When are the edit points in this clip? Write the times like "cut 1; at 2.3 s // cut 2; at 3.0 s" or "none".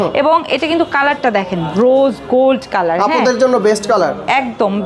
none

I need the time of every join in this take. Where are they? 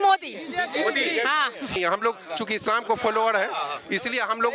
cut 1; at 1.8 s

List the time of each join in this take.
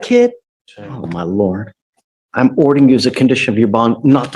cut 1; at 1.7 s

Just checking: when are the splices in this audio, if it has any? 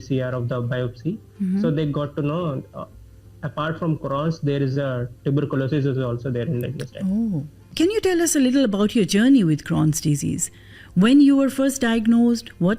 cut 1; at 7.6 s

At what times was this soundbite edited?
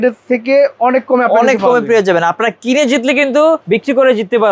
cut 1; at 3.6 s

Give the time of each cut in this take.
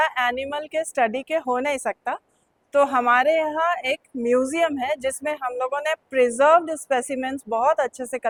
none

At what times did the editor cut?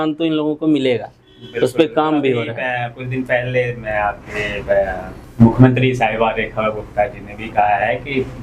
none

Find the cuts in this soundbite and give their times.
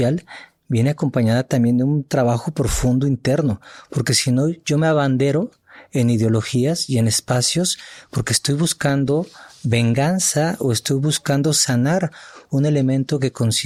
none

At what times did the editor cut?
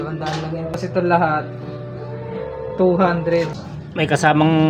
cut 1; at 3.5 s

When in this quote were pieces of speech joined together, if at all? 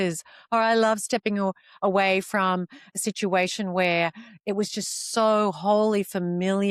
none

